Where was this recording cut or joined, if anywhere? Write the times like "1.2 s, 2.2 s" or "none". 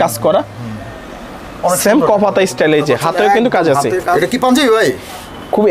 4.2 s